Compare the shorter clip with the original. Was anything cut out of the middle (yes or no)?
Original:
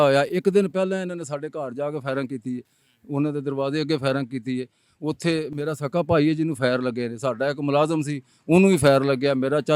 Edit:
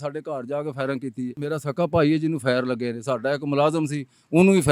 yes